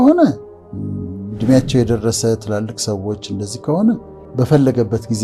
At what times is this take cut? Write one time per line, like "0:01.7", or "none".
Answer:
0:04.2